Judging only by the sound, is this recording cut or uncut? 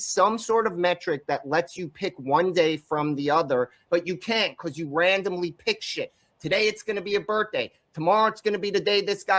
cut